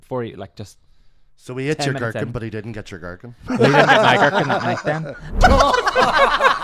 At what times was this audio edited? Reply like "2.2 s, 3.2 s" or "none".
5.4 s